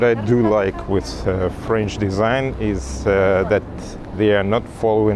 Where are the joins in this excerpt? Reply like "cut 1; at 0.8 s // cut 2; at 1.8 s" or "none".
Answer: none